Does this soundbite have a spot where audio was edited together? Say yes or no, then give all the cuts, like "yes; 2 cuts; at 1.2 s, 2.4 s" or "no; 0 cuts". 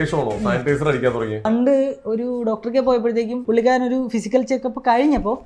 yes; 2 cuts; at 1.5 s, 3.4 s